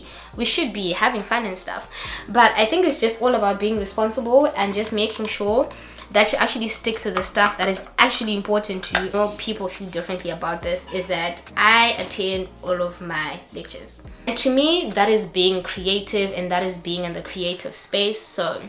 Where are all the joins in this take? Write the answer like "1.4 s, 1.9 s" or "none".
9.1 s, 14.3 s